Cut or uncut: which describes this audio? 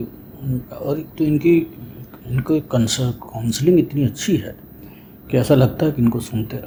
uncut